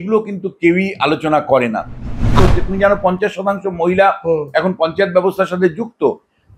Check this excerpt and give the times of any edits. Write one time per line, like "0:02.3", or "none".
0:02.3